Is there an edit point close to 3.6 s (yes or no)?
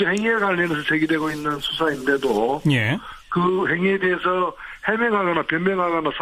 no